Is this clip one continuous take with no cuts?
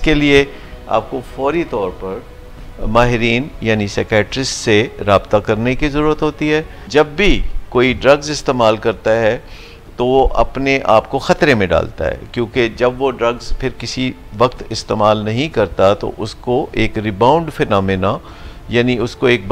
no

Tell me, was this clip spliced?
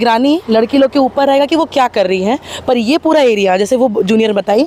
no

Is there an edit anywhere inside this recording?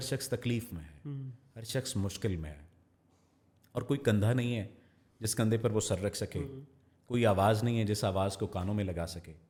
no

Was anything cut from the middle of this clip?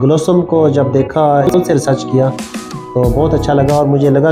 yes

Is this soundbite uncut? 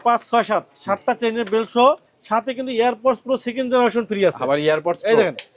yes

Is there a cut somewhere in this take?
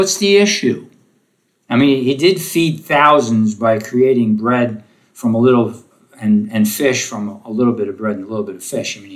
no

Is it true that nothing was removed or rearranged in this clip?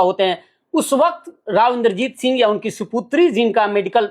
yes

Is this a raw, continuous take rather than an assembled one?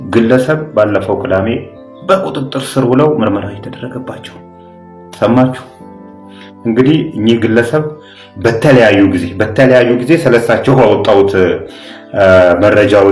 yes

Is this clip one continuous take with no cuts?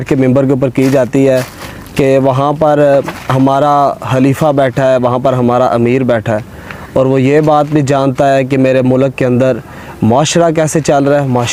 yes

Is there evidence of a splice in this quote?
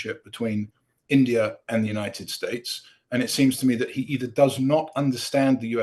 no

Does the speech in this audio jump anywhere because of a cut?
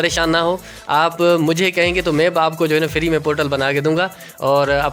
no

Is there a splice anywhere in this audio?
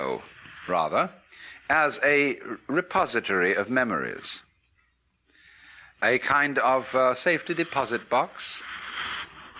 no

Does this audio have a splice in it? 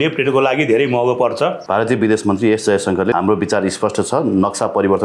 yes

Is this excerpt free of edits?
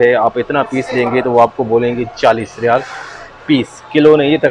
yes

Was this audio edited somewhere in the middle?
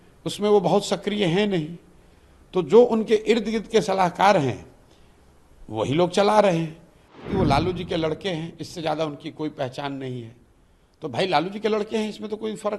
yes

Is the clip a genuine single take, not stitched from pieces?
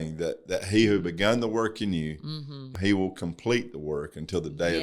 no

